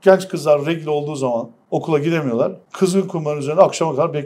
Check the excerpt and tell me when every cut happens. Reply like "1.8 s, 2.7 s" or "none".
1.6 s, 2.6 s